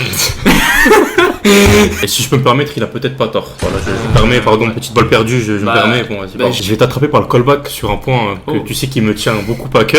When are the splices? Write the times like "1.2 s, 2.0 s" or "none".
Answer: 2.0 s, 6.6 s